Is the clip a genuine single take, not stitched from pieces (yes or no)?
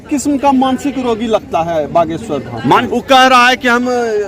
no